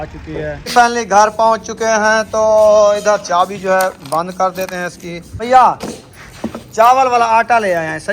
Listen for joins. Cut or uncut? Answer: cut